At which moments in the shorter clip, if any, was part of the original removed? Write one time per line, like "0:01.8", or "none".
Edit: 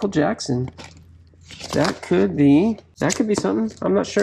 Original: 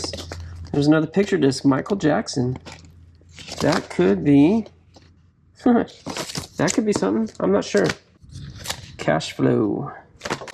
0:02.9